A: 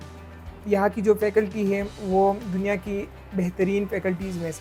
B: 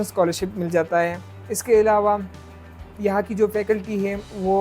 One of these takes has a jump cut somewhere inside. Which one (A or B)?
B